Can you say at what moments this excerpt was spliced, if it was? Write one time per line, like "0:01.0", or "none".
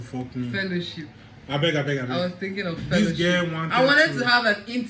none